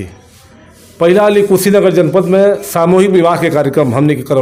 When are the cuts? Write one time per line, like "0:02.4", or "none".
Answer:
none